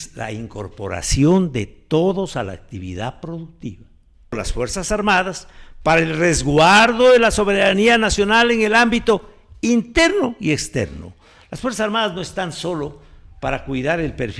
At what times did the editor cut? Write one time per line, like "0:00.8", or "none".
0:04.4